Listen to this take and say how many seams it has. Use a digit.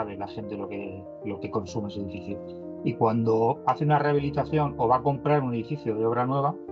0